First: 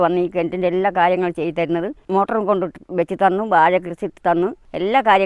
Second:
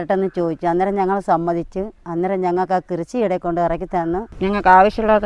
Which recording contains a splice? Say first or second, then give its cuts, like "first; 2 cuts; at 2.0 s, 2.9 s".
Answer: second; 1 cut; at 4.3 s